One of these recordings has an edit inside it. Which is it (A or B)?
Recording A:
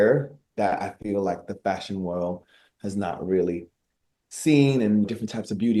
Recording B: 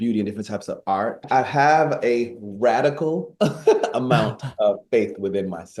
B